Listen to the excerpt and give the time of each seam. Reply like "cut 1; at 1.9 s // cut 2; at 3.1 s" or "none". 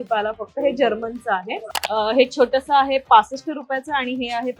cut 1; at 1.5 s